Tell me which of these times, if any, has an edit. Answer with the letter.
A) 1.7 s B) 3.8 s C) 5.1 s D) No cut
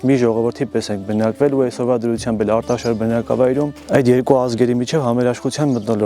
B